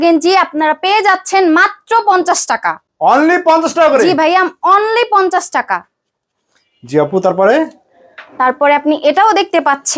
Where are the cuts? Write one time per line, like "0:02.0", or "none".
none